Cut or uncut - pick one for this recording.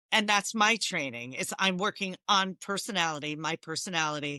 uncut